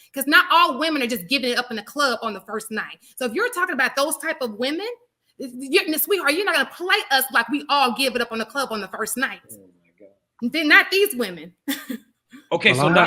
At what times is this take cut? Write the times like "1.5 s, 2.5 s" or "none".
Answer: none